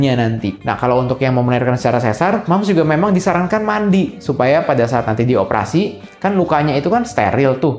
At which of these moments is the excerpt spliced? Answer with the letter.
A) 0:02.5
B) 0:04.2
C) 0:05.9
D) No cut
D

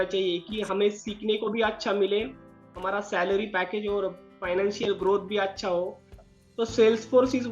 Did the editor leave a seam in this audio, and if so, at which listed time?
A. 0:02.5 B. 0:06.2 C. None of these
B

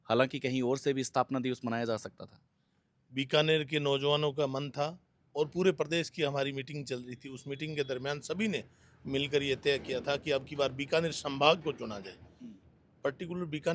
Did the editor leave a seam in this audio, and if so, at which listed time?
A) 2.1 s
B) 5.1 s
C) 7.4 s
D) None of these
D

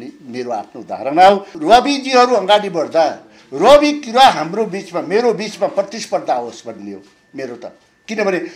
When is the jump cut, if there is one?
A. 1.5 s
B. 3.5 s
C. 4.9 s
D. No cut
A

